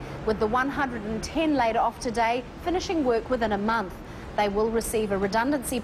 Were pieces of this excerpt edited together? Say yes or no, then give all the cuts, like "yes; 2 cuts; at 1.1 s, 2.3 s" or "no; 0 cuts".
no; 0 cuts